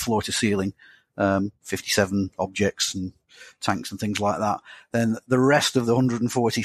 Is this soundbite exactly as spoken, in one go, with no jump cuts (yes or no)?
yes